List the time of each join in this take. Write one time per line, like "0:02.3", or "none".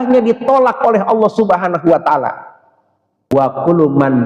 0:03.3